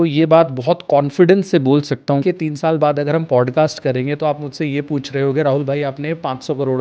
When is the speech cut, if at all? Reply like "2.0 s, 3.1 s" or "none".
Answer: 2.2 s